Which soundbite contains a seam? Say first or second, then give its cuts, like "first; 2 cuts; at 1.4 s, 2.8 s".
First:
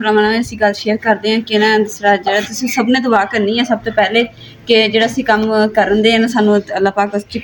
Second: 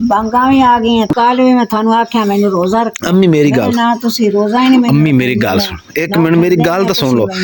second; 1 cut; at 1.1 s